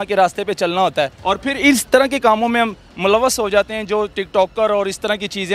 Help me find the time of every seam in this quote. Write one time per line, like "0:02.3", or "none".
0:01.2